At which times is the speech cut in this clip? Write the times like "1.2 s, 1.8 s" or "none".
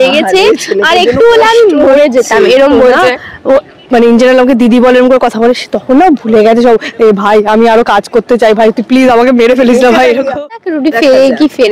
10.4 s

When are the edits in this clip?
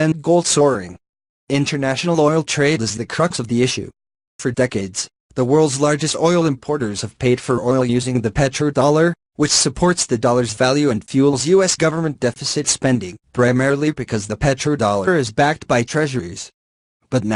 none

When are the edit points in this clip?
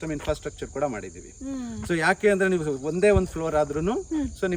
none

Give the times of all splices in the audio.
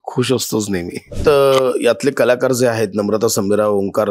1.1 s

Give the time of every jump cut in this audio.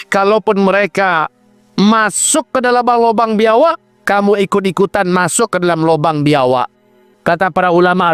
7.1 s

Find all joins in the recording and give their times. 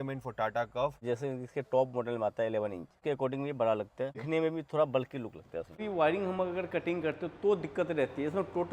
1.0 s, 2.9 s, 4.2 s, 5.8 s

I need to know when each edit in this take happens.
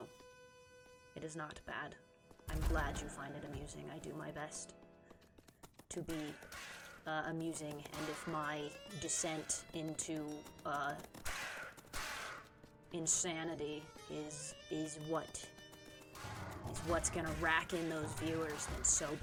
none

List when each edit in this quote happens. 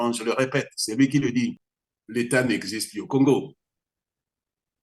1.7 s

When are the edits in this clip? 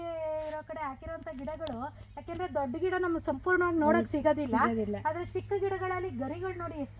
none

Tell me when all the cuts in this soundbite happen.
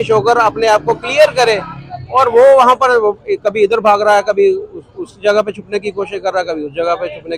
none

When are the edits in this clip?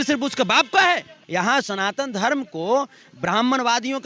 1.1 s

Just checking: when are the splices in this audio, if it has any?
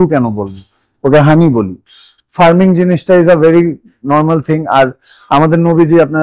2.0 s

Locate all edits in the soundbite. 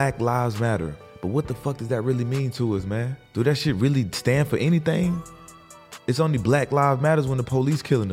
1.0 s, 3.2 s

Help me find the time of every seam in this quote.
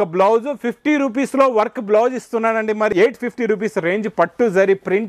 2.9 s

